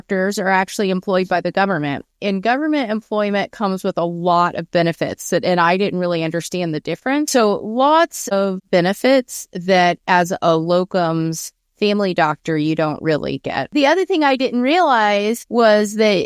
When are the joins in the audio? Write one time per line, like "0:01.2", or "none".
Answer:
0:07.3
0:13.7